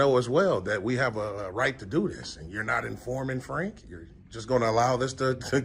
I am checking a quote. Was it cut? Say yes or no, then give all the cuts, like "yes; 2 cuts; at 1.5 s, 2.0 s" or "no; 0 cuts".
no; 0 cuts